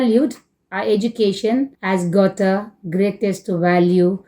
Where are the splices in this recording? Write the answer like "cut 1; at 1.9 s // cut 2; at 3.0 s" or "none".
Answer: cut 1; at 1.8 s

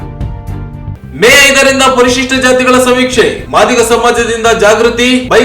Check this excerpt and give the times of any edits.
cut 1; at 0.9 s

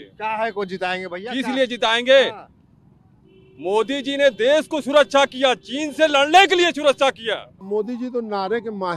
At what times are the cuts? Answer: cut 1; at 7.5 s

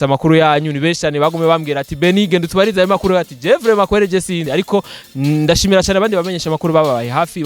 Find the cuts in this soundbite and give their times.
cut 1; at 4.4 s

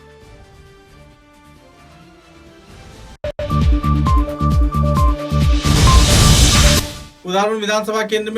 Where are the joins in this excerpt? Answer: cut 1; at 3.3 s // cut 2; at 6.8 s

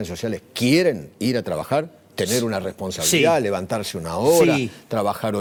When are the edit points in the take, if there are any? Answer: none

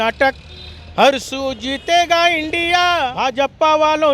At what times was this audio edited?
cut 1; at 3.1 s

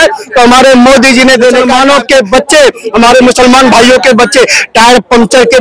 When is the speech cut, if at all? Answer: cut 1; at 1.7 s

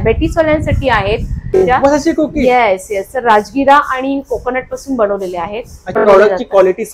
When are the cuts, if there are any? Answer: cut 1; at 1.6 s // cut 2; at 6.0 s

